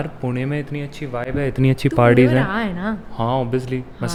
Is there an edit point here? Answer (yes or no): no